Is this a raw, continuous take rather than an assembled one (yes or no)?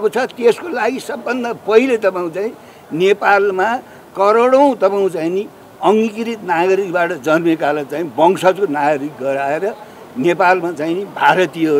yes